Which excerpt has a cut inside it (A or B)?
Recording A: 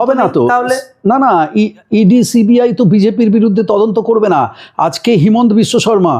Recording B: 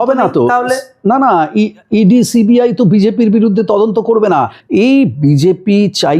B